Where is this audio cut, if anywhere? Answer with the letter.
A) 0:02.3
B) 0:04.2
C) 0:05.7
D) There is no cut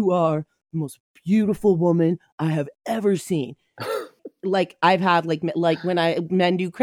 B